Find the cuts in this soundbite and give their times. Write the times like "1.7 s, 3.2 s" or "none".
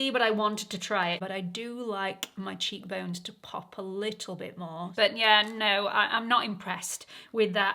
1.2 s, 5.1 s